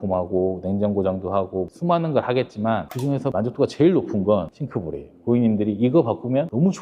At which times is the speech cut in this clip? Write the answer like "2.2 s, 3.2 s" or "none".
none

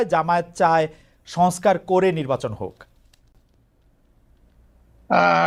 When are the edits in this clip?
none

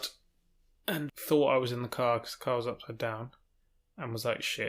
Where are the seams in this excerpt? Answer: 1.1 s

